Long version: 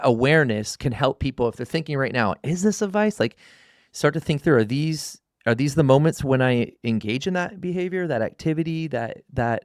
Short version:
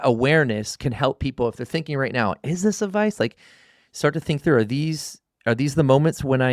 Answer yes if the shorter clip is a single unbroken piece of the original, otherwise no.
yes